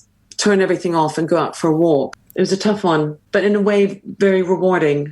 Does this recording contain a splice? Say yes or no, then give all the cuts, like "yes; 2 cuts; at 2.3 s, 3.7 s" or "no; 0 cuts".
yes; 2 cuts; at 2.2 s, 3.2 s